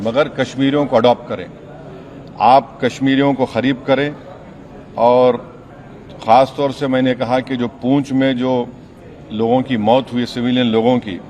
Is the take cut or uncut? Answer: uncut